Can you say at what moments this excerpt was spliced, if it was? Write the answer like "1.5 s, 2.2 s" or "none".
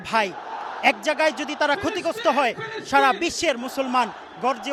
none